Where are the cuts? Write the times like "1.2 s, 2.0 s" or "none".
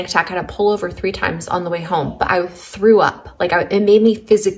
none